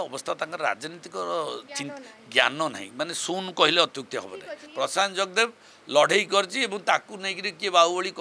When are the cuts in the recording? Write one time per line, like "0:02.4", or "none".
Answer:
0:04.6